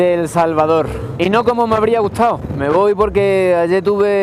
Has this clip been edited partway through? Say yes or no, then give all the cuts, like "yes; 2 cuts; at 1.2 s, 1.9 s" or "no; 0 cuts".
yes; 1 cut; at 2.5 s